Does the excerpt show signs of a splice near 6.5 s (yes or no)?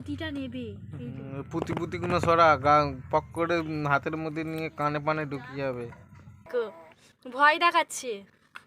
yes